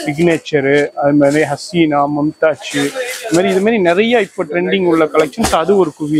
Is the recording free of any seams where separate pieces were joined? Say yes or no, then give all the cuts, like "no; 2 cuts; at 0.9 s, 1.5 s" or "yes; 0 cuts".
yes; 0 cuts